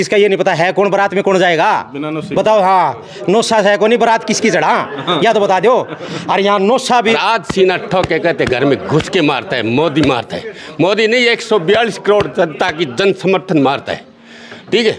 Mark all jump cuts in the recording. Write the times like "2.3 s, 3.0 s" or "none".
7.1 s